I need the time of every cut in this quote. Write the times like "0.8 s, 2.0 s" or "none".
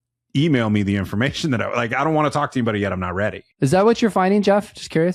3.7 s